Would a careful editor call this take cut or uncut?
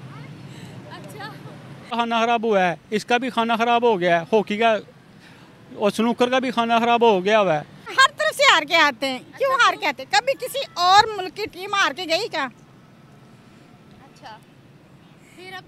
cut